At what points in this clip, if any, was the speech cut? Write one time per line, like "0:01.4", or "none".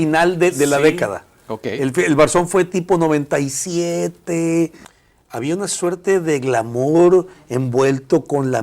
0:04.8

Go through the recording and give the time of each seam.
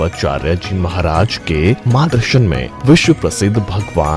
0:02.2

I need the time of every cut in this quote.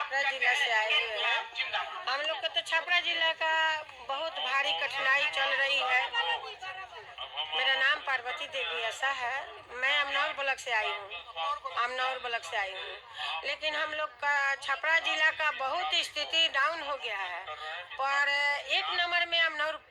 none

